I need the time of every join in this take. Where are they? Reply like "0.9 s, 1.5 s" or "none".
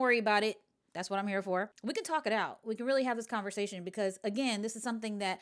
1.7 s